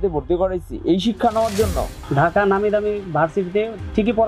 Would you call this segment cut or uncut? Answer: cut